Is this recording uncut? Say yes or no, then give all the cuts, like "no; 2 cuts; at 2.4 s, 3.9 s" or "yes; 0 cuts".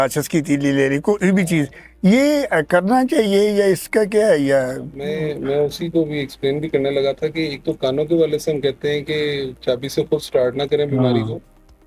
yes; 0 cuts